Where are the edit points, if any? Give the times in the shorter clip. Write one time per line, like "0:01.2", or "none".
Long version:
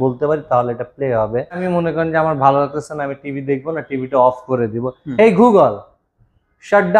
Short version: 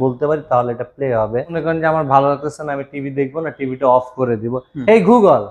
0:01.5